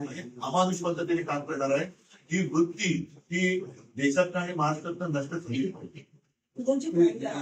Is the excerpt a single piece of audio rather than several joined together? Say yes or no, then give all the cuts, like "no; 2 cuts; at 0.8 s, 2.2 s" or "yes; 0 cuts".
yes; 0 cuts